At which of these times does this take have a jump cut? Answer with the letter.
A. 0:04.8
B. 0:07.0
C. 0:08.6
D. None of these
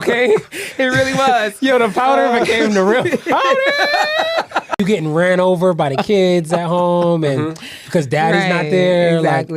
A